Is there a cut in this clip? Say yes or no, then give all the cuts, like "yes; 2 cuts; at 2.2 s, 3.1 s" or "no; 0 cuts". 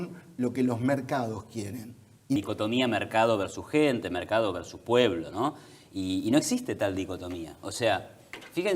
yes; 1 cut; at 2.4 s